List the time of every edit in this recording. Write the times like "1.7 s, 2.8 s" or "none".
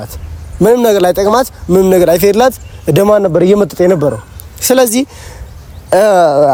none